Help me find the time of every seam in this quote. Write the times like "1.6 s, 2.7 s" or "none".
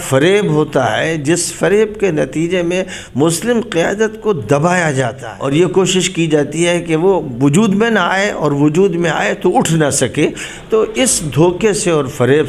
5.2 s